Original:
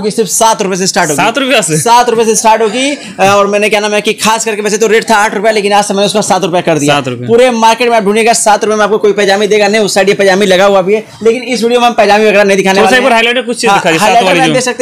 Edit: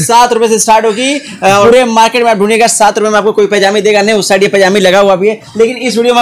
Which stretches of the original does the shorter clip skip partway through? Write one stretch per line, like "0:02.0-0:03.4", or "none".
0:03.4-0:07.3